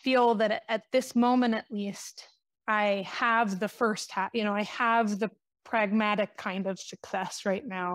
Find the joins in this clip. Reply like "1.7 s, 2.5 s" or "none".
none